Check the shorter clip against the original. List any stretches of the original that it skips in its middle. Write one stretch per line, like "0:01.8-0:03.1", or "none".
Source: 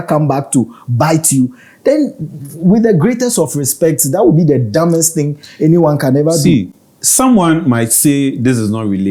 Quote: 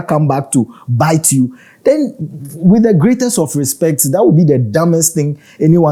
none